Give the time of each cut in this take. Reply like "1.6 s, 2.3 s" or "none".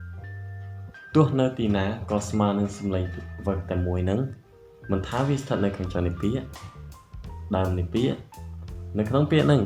1.1 s